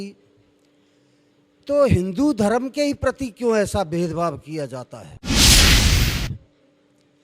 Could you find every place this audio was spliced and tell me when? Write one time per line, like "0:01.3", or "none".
0:05.2
0:06.2